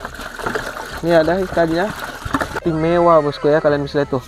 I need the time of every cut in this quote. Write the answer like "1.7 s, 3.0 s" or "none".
2.5 s